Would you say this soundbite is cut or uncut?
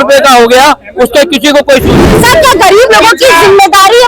cut